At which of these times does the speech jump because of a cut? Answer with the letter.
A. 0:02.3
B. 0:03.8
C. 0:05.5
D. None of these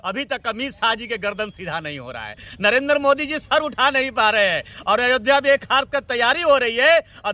D